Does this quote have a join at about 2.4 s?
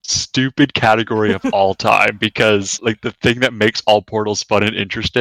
no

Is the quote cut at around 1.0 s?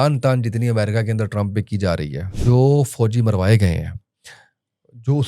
no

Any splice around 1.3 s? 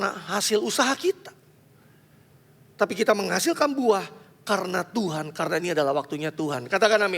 no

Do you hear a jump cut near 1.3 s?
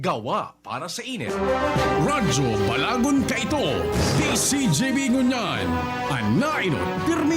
yes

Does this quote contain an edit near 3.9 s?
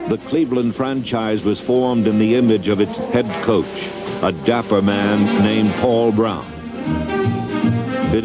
no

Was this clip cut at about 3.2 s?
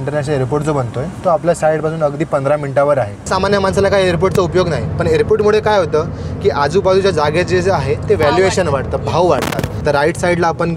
yes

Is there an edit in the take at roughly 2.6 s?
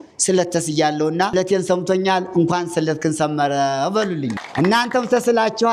no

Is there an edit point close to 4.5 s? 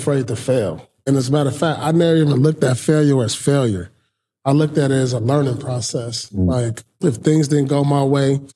no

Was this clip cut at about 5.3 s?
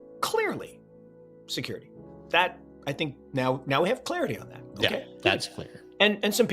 no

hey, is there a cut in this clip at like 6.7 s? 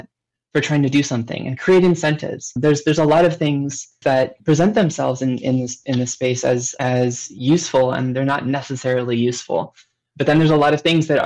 no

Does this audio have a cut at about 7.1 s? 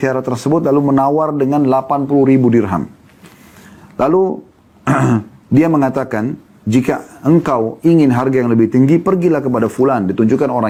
no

